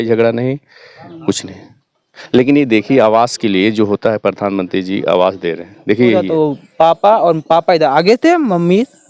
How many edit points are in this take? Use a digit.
1